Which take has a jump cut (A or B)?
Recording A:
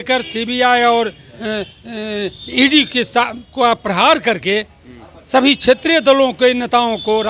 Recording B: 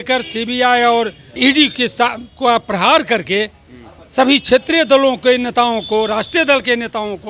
B